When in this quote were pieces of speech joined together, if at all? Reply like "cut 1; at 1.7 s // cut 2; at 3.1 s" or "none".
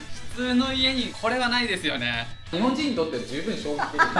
cut 1; at 1.1 s // cut 2; at 2.5 s